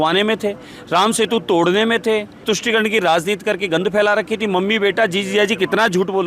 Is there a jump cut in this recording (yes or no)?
yes